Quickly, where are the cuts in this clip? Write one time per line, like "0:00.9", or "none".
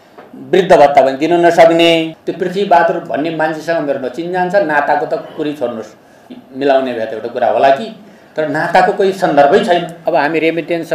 0:02.1
0:09.9